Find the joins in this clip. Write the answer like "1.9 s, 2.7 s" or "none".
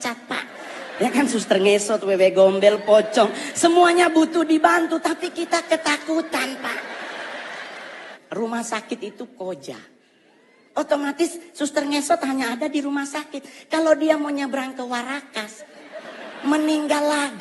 8.1 s

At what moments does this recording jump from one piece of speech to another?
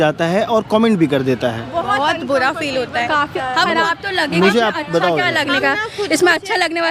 none

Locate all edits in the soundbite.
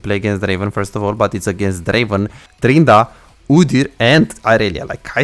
none

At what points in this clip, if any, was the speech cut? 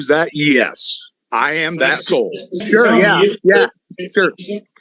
2.6 s

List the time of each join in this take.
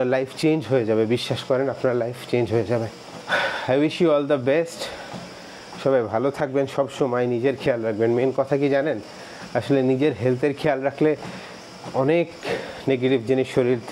none

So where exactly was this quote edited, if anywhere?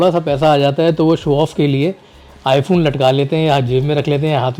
none

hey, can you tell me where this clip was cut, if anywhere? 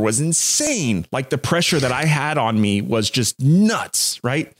none

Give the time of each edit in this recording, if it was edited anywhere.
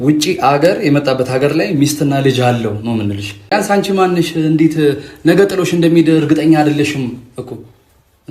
3.5 s

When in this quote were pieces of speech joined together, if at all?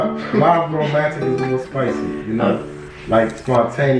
none

